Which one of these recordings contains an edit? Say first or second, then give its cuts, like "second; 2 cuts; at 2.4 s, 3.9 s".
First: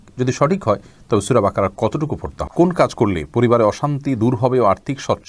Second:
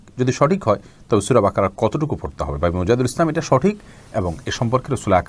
first; 1 cut; at 2.4 s